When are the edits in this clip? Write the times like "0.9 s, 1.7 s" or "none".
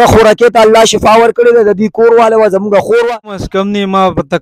3.4 s